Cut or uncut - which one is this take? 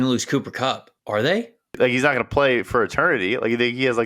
cut